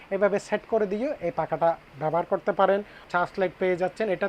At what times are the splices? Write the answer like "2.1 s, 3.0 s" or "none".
3.0 s